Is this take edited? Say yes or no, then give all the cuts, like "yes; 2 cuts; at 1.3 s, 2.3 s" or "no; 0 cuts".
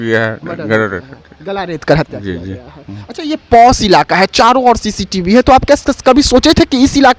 no; 0 cuts